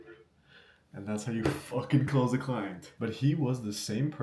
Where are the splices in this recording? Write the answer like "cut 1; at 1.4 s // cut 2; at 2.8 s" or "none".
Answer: cut 1; at 2.8 s